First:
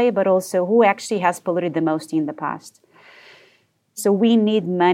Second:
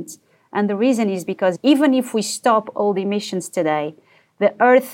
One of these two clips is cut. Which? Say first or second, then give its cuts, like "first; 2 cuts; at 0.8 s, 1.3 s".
first; 1 cut; at 4.0 s